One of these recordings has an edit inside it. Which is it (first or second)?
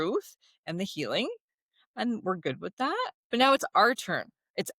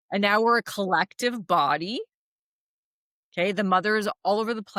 first